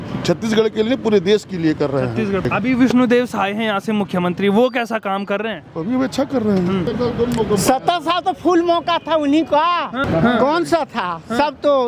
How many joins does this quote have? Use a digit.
3